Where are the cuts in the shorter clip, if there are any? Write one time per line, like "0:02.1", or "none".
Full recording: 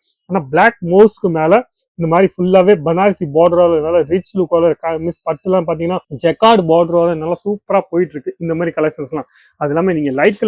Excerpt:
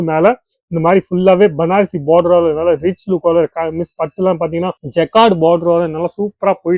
none

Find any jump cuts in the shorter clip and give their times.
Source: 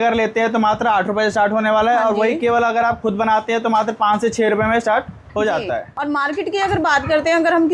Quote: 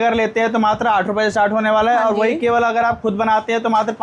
none

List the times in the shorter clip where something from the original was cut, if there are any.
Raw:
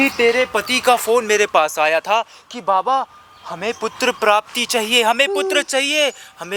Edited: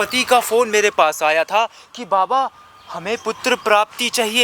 none

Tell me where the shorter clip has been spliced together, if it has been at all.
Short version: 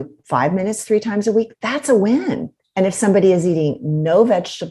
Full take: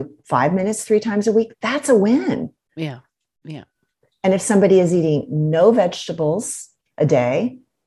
0:02.5

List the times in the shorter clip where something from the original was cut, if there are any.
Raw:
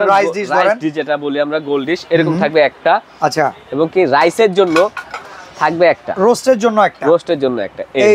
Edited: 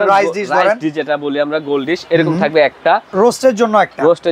0:03.1

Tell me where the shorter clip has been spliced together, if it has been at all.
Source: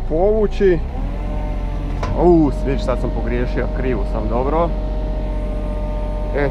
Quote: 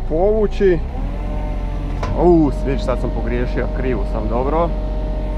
none

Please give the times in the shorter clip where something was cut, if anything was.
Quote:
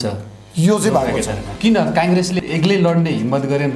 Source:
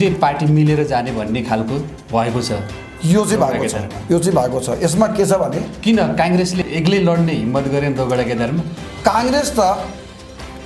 0:01.5

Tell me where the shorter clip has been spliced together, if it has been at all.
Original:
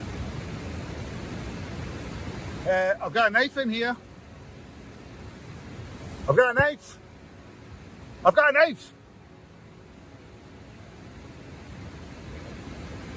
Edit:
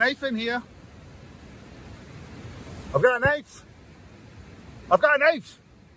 none

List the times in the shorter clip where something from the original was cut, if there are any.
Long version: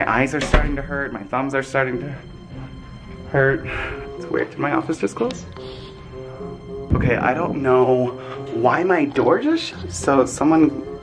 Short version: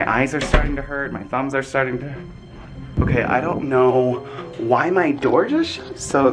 0:02.9

